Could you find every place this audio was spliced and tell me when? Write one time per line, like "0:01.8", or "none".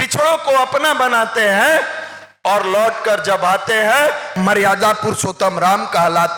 0:04.3